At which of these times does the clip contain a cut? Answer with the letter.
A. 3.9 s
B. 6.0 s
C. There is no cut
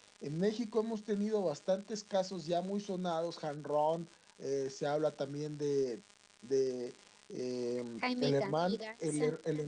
A